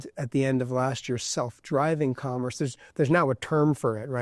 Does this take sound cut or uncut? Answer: uncut